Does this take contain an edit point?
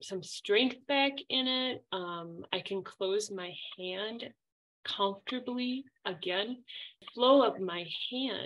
yes; 1 cut; at 7.0 s

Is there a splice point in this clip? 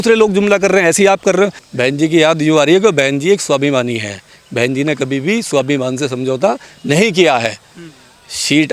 yes; 1 cut; at 1.6 s

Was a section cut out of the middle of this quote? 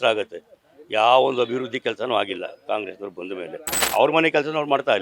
yes; 1 cut; at 3.8 s

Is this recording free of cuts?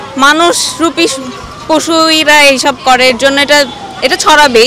yes; 0 cuts

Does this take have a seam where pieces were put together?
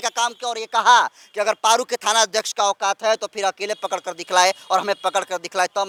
no; 0 cuts

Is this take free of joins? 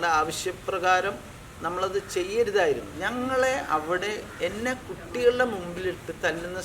no; 1 cut; at 2.9 s

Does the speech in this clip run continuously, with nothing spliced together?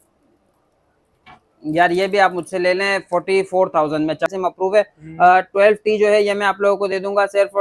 no; 1 cut; at 4.3 s

